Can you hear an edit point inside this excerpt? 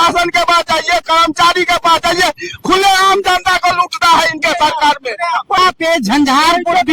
yes; 1 cut; at 5.6 s

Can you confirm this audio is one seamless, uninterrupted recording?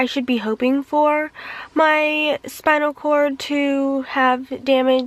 yes; 0 cuts

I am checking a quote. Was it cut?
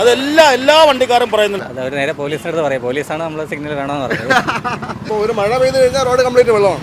yes; 2 cuts; at 1.7 s, 5.0 s

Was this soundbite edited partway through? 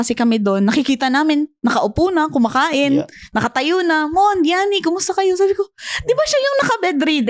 no; 0 cuts

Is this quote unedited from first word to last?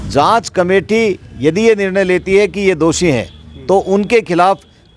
yes; 0 cuts

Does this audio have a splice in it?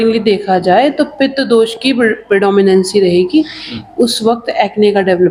no; 0 cuts

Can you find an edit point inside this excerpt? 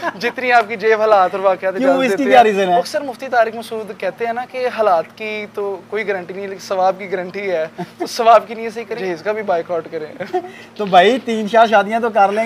yes; 1 cut; at 9.0 s

